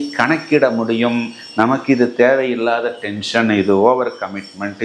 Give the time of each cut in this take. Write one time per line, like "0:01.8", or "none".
none